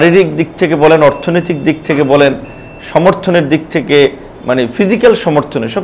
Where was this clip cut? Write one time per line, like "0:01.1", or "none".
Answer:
none